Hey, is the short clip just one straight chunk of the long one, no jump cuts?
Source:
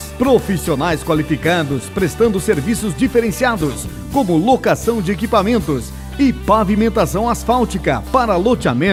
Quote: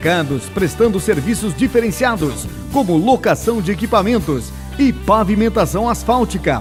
yes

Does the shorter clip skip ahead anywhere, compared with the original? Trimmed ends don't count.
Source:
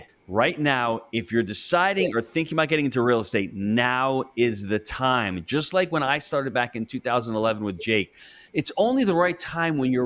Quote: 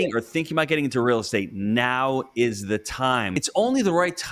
yes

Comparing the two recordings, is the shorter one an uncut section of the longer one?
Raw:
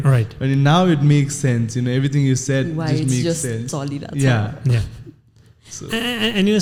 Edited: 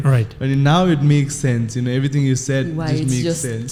yes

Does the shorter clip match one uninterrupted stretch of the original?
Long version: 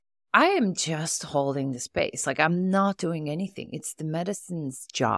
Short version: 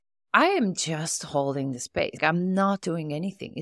no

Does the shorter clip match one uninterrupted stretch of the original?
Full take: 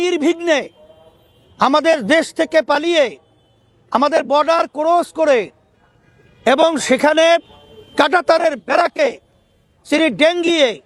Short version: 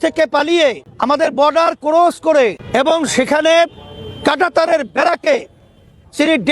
no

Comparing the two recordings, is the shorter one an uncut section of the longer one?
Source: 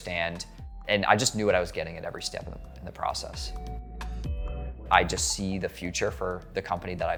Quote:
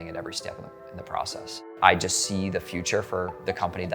no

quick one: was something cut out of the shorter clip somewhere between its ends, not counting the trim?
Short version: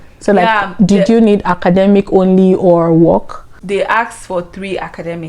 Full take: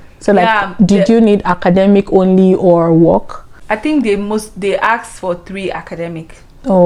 yes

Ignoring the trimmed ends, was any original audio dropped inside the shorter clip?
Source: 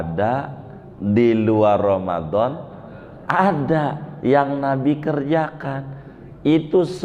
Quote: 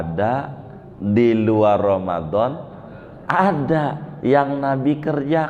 no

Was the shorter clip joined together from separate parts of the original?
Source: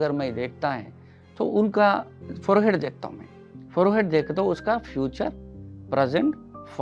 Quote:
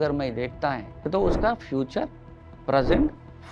yes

